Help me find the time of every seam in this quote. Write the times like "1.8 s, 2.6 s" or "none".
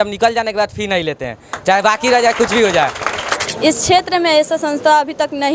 3.4 s